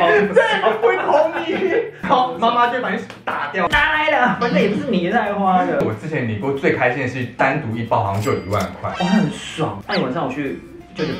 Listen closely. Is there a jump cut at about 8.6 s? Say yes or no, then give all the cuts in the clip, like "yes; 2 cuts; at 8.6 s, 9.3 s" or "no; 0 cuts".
no; 4 cuts; at 2.0 s, 3.7 s, 5.8 s, 9.8 s